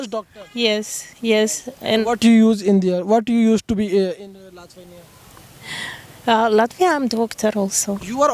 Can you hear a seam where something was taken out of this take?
no; 0 cuts

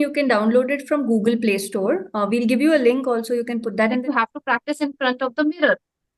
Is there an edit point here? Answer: yes; 1 cut; at 4.0 s

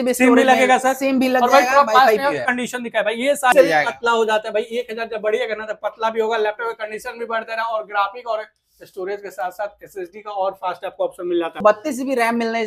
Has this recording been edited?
yes; 2 cuts; at 3.5 s, 11.6 s

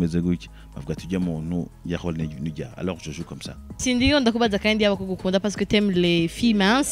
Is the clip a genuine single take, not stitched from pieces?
no; 1 cut; at 3.7 s

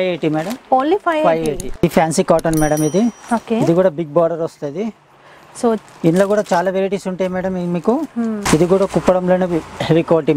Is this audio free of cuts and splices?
no; 2 cuts; at 1.7 s, 8.4 s

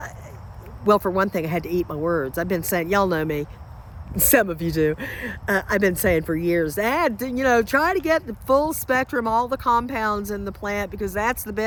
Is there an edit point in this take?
no; 0 cuts

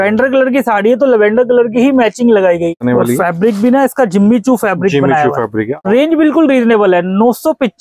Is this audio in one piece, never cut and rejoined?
no; 2 cuts; at 2.7 s, 5.8 s

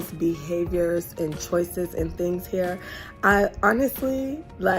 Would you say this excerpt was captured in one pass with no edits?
yes; 0 cuts

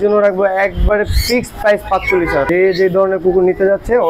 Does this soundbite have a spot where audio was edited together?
yes; 1 cut; at 2.5 s

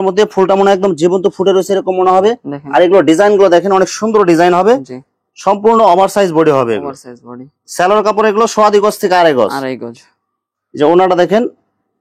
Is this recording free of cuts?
yes; 0 cuts

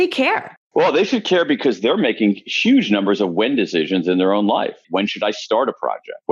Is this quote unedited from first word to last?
no; 1 cut; at 4.8 s

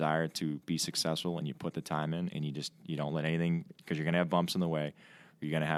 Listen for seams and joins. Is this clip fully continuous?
yes; 0 cuts

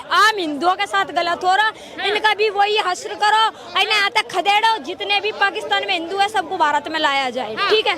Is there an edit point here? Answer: no; 0 cuts

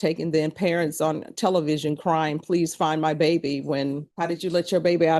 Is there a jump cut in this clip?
yes; 1 cut; at 4.1 s

